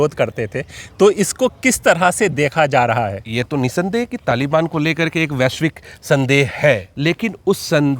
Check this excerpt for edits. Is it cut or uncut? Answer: cut